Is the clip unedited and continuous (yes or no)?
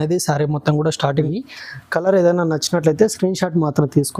no